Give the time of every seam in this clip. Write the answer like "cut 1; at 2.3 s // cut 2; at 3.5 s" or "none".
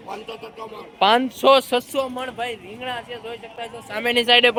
none